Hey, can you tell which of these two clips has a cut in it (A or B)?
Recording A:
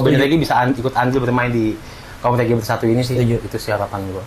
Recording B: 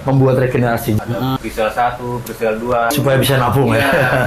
B